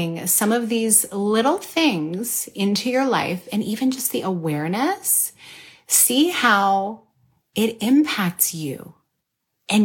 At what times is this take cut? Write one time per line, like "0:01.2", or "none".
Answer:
none